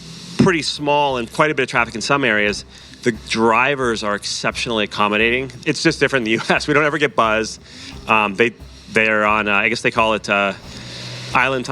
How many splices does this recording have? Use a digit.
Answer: 2